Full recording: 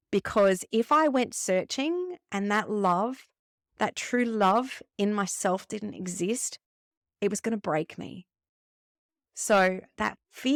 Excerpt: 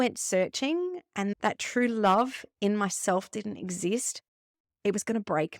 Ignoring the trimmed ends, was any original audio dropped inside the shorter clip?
yes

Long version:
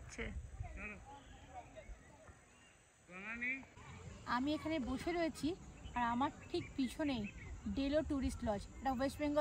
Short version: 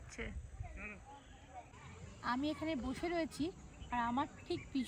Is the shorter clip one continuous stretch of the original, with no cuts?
no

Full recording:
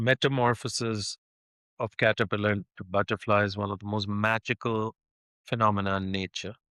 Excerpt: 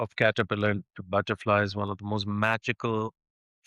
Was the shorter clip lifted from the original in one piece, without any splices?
yes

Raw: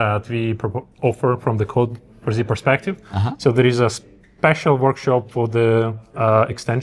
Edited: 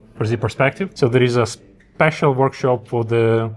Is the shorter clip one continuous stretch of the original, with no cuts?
no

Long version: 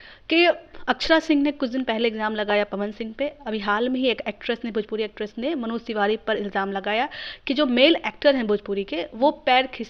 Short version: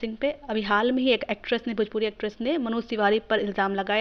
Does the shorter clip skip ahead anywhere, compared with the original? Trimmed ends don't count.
no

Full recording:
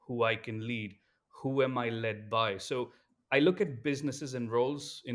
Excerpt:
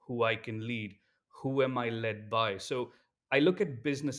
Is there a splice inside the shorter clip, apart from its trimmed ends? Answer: no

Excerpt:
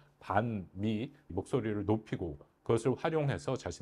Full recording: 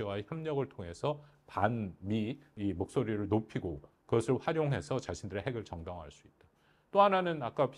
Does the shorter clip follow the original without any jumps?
no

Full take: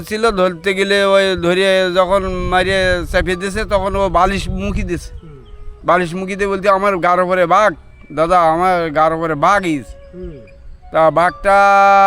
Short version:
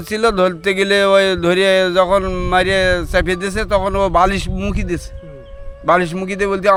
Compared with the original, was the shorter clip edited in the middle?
no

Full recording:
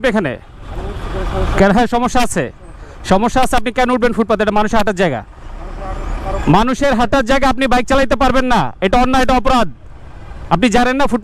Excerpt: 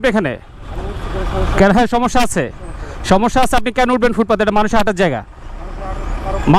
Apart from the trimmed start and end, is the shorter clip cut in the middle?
no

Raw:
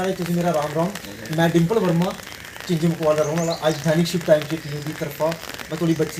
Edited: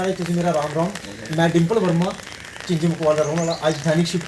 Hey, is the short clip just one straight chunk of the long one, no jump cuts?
yes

